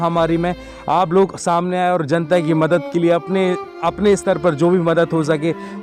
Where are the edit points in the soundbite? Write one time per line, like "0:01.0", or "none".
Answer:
none